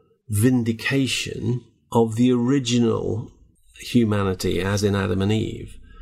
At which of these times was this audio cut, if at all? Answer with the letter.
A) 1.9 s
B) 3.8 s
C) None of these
C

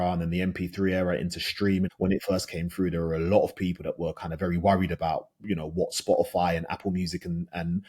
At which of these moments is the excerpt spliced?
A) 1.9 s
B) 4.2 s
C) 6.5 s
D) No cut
A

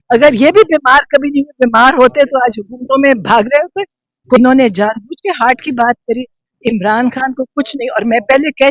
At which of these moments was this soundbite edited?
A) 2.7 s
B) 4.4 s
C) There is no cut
B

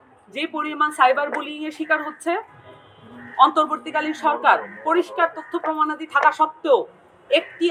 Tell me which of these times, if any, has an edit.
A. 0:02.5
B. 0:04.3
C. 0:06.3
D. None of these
D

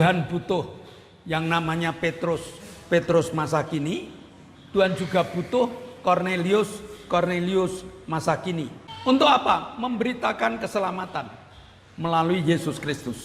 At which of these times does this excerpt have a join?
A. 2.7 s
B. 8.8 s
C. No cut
B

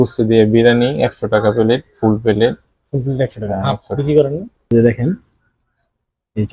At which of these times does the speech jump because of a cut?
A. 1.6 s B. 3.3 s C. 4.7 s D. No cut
C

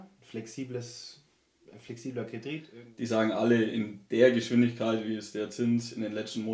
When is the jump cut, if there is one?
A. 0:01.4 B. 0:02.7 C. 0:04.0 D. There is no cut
B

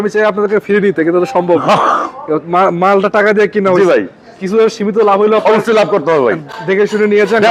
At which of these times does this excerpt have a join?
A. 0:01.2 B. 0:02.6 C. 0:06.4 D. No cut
D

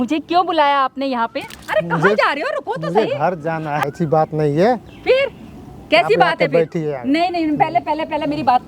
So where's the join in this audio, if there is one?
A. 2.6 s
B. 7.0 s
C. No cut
C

